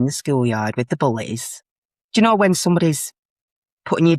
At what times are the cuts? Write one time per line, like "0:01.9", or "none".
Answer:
none